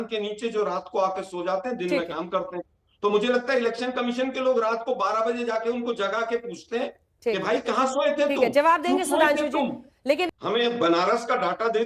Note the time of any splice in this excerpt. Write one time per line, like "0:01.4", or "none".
0:10.3